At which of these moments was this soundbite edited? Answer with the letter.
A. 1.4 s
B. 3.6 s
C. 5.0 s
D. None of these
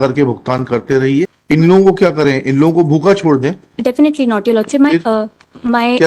A